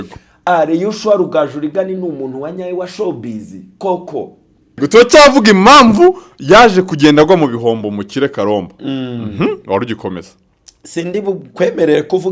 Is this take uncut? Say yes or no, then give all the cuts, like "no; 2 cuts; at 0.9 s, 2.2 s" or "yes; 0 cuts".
no; 1 cut; at 4.8 s